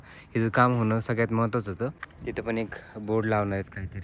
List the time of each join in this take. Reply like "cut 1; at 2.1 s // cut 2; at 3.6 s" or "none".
cut 1; at 2.1 s